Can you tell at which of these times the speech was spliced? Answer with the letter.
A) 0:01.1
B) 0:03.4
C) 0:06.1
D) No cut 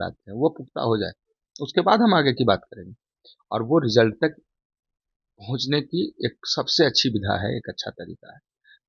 D